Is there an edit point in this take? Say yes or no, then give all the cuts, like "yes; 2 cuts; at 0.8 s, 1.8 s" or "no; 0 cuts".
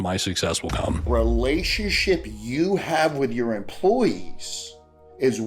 yes; 1 cut; at 1.1 s